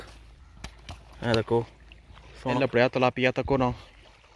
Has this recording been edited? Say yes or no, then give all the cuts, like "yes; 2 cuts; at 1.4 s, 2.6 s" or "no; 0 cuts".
yes; 1 cut; at 2.5 s